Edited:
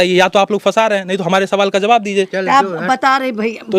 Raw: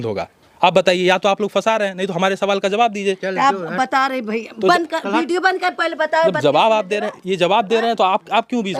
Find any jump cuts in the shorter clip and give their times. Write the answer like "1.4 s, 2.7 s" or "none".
none